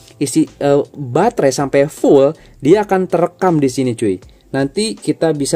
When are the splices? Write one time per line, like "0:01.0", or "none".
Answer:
0:04.3